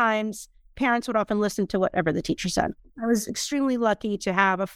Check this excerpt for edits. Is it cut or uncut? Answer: cut